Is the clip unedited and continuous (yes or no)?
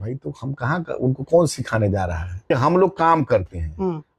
no